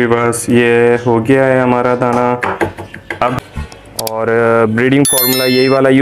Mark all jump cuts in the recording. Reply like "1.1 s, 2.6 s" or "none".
3.3 s